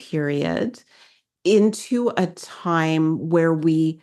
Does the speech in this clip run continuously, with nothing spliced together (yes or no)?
no